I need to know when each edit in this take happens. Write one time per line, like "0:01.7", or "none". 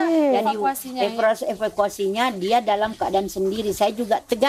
none